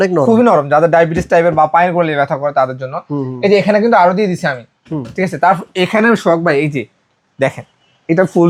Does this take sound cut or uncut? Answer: uncut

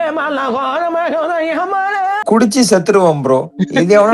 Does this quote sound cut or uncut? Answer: cut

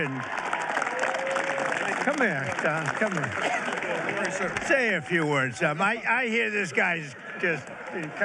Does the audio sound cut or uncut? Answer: uncut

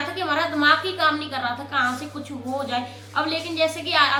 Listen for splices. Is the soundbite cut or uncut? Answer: uncut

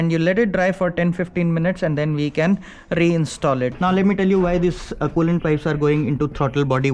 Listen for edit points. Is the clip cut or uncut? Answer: cut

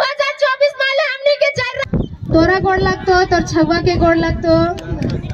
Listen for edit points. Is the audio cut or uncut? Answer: cut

